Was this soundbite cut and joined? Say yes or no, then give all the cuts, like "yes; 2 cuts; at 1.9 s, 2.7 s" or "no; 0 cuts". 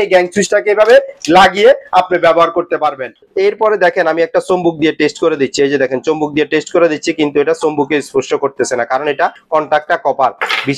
yes; 2 cuts; at 3.2 s, 9.4 s